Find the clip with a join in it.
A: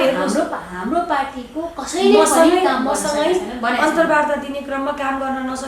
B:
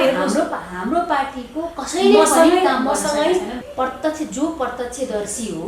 B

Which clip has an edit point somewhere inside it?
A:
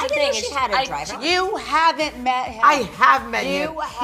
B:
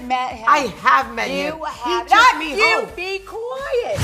A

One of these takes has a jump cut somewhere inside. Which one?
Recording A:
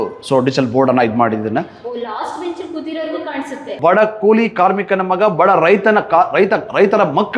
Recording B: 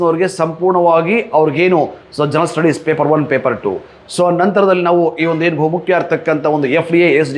A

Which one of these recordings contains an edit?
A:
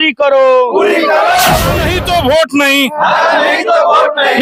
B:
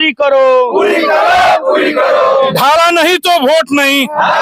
A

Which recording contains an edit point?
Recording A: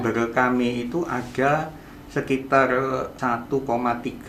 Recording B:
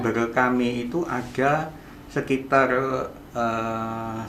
A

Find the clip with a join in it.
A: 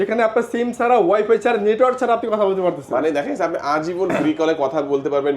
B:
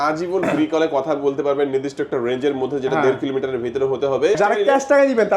B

